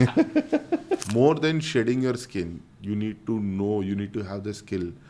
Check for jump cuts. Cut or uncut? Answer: cut